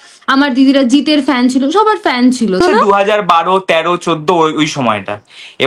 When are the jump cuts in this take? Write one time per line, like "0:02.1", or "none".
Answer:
0:02.6